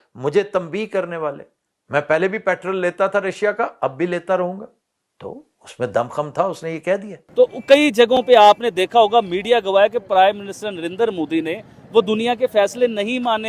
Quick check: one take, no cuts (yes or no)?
no